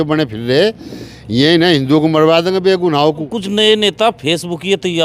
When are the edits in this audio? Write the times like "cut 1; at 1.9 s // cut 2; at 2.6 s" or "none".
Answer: cut 1; at 3.4 s